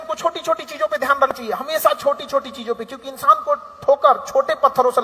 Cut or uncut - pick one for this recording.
cut